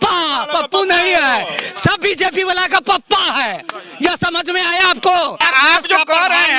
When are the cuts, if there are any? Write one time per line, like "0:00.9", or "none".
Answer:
0:05.4